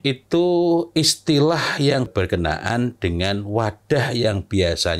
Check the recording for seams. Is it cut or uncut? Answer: cut